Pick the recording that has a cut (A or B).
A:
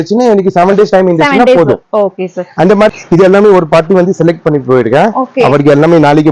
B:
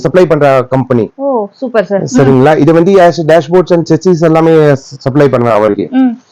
A